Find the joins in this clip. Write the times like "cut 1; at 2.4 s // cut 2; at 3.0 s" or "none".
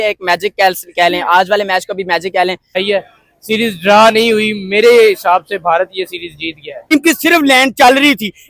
cut 1; at 2.8 s // cut 2; at 6.9 s